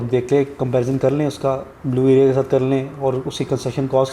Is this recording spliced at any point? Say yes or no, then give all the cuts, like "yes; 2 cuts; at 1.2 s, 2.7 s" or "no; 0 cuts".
no; 0 cuts